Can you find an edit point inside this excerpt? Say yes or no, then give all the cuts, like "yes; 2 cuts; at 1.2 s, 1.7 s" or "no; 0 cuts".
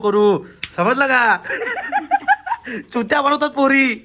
no; 0 cuts